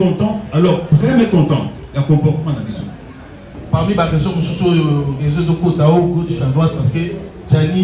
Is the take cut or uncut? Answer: cut